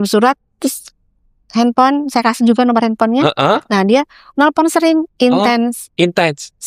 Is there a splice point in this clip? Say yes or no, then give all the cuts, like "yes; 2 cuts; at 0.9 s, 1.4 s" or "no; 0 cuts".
no; 0 cuts